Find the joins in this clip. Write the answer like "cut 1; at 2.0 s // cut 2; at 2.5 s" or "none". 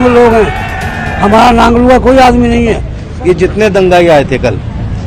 cut 1; at 3.0 s

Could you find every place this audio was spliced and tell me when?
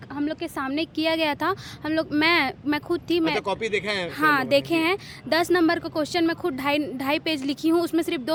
none

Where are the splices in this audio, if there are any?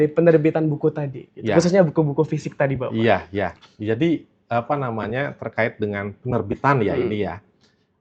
none

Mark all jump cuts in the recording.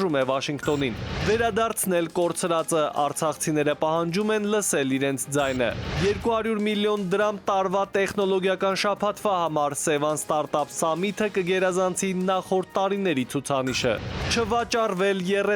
cut 1; at 14.3 s

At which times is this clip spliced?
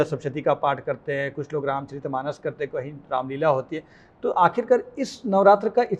none

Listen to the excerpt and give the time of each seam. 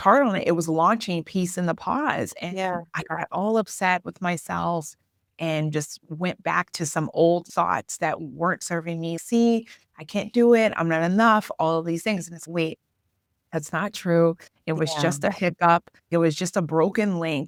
none

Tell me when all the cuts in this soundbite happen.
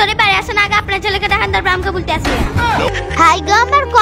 cut 1; at 2.9 s

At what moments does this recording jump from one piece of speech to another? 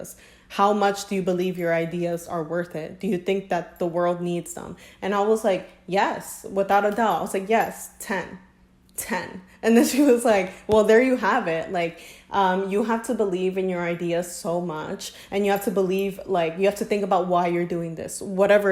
none

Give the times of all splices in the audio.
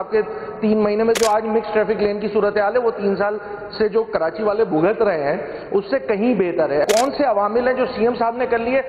cut 1; at 6.8 s

